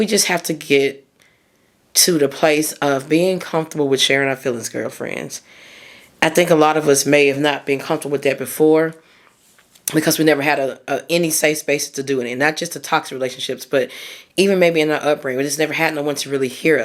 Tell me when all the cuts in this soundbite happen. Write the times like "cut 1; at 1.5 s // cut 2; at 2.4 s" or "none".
none